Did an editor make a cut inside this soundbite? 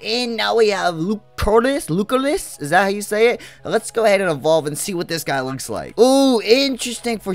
no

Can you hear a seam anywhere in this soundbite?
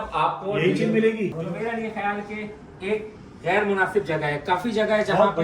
yes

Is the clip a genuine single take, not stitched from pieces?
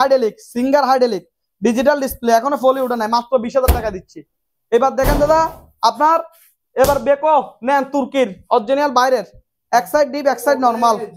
yes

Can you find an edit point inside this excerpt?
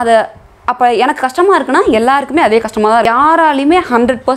yes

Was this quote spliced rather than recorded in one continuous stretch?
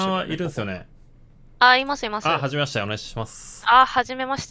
no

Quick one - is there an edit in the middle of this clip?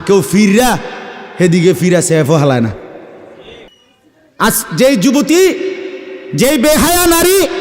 yes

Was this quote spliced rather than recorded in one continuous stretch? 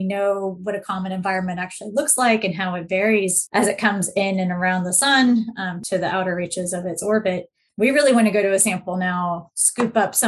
yes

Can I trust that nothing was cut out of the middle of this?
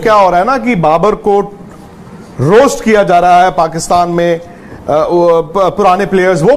yes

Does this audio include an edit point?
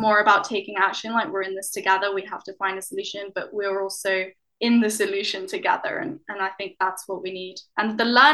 no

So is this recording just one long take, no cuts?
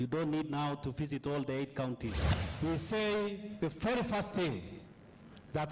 no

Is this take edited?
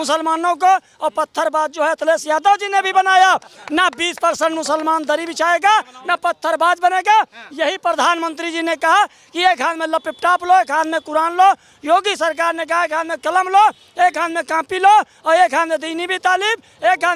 no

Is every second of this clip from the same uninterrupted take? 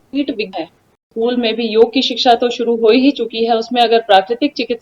no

